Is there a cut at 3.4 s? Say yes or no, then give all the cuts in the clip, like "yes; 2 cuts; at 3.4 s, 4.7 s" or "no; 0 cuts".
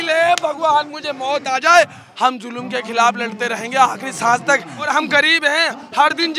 no; 2 cuts; at 2.0 s, 4.9 s